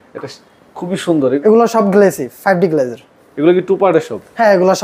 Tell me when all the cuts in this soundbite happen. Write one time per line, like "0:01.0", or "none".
0:01.4